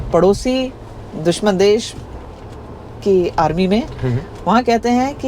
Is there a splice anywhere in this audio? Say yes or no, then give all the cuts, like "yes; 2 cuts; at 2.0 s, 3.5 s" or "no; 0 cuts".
no; 0 cuts